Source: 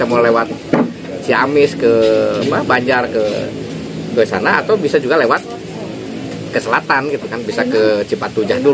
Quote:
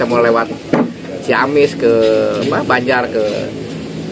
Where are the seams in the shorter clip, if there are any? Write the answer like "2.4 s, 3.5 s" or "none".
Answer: none